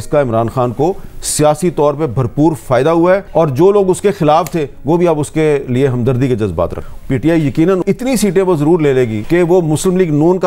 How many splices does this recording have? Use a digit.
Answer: 3